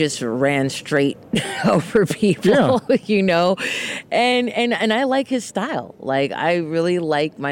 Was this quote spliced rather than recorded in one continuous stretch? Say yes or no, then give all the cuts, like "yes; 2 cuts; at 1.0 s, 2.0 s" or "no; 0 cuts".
no; 0 cuts